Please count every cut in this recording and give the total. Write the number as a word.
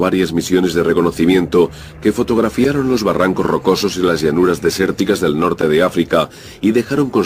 one